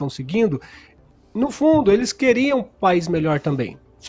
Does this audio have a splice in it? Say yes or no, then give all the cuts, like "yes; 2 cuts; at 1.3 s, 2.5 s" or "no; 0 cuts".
no; 0 cuts